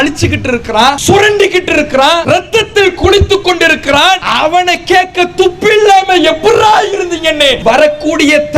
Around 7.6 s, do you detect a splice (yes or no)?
yes